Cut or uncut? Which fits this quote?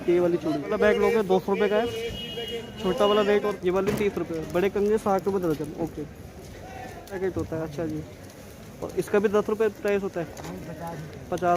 cut